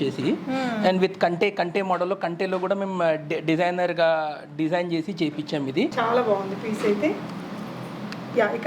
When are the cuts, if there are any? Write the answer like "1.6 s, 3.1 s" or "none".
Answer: 5.9 s